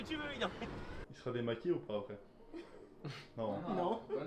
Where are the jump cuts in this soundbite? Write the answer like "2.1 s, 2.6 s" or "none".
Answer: 1.0 s